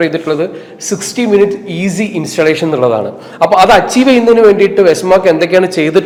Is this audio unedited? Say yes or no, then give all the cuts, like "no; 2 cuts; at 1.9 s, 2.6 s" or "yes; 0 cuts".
yes; 0 cuts